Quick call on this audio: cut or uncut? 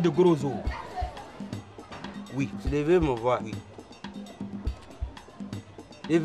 cut